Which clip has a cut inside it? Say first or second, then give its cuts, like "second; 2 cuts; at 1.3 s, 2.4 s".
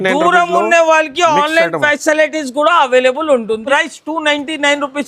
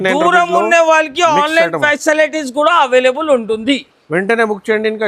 first; 1 cut; at 3.6 s